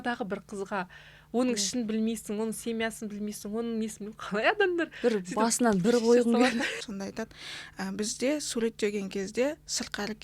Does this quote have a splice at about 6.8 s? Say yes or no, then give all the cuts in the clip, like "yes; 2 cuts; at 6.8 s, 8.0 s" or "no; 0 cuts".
yes; 1 cut; at 6.8 s